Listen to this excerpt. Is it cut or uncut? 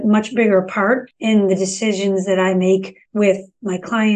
cut